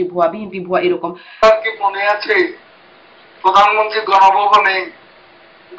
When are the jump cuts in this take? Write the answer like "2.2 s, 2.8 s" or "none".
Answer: 1.4 s